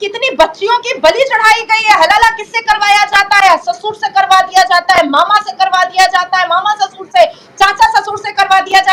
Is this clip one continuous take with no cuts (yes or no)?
yes